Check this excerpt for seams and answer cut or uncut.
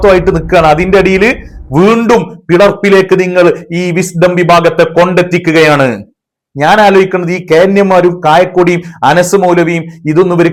uncut